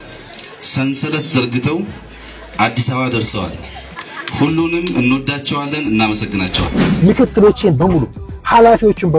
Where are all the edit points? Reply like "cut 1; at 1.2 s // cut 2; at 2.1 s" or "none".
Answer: cut 1; at 6.6 s